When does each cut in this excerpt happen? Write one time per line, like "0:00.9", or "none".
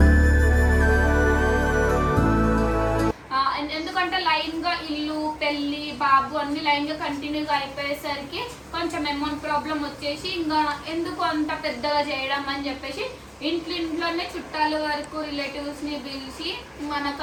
none